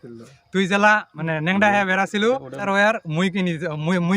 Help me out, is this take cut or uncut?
cut